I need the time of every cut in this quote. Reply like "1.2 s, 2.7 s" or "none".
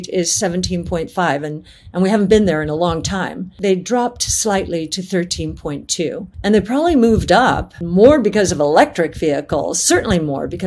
3.6 s, 6.3 s, 7.7 s

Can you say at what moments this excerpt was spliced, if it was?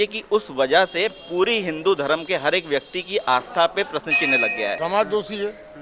4.8 s

